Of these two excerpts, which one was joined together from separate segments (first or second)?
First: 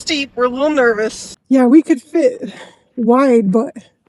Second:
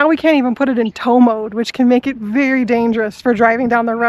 first